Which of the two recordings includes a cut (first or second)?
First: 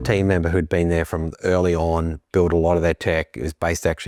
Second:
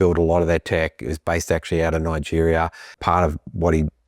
second